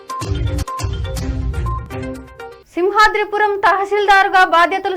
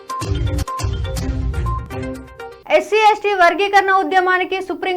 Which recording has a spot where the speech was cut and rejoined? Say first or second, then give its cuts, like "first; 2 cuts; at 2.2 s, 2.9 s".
second; 1 cut; at 2.6 s